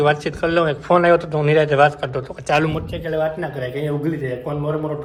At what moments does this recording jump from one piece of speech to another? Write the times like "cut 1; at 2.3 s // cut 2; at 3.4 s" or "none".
none